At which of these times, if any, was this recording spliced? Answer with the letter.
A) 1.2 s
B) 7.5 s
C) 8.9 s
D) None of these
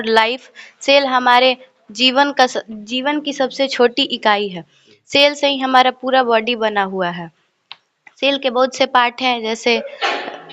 D